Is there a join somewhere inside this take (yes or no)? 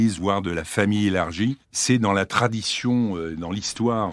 no